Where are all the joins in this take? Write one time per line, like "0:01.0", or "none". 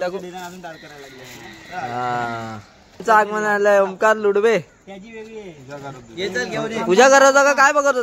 0:03.0